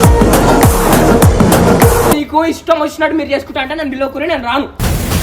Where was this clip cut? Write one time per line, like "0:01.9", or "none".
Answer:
0:02.2

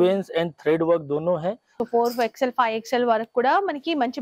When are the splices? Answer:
0:01.7

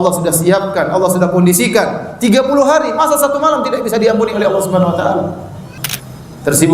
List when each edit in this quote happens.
0:05.7

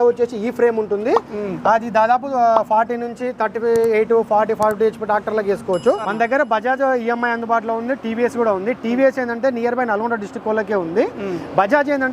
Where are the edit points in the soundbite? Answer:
0:06.0

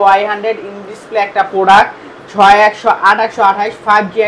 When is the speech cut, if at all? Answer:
none

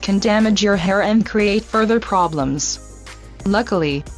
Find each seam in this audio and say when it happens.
0:02.5

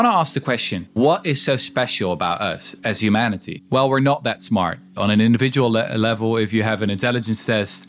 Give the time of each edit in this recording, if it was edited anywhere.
0:01.0
0:03.5
0:04.9

